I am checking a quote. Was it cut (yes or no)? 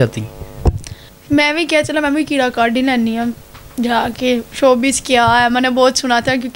yes